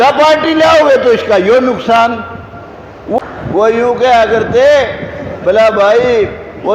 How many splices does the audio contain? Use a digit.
1